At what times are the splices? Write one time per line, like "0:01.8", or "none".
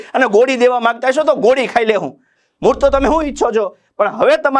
none